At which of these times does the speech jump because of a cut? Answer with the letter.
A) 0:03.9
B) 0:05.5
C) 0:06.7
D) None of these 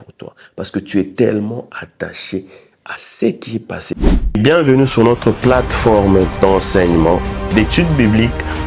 A